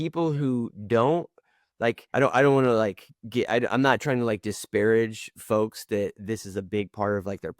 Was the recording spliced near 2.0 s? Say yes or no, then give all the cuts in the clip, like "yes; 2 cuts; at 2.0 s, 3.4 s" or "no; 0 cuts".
yes; 1 cut; at 2.0 s